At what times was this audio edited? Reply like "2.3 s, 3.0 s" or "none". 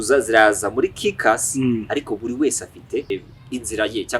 3.1 s

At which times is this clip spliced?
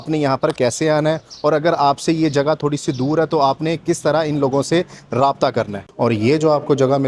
5.8 s

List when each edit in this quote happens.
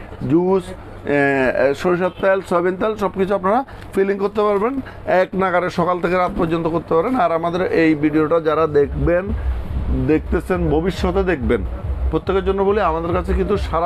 none

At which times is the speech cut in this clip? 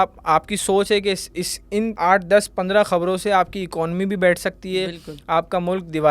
1.9 s

